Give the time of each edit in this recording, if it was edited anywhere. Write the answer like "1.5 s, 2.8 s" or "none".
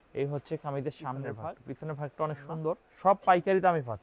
1.3 s, 2.9 s